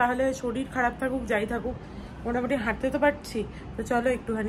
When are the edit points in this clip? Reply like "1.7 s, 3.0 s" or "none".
none